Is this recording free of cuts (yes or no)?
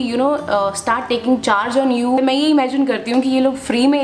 no